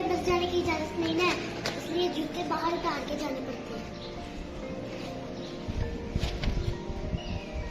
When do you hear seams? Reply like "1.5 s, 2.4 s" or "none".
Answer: none